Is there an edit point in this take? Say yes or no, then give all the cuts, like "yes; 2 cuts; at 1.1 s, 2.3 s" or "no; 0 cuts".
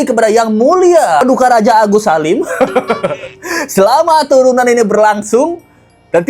no; 0 cuts